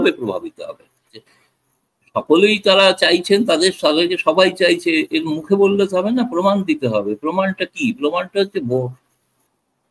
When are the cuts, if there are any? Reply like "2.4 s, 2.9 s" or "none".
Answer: 1.2 s

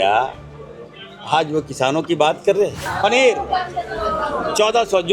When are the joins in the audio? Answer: 2.8 s

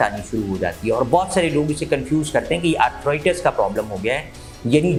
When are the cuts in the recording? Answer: none

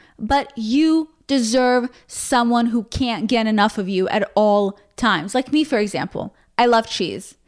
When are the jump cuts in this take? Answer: none

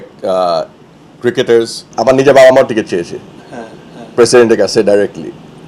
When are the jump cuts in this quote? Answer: 1.8 s

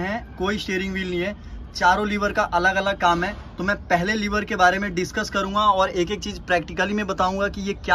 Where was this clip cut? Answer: none

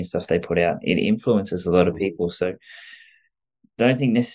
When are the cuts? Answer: 3.4 s

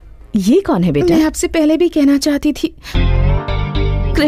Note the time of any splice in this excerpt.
none

